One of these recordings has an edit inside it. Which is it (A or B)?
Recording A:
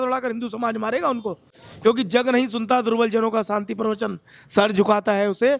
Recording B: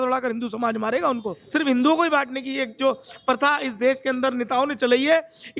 B